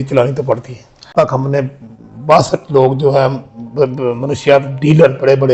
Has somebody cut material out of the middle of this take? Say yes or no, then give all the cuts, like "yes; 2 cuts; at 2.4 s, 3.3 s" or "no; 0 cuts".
yes; 1 cut; at 1.1 s